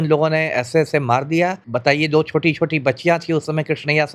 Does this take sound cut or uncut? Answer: cut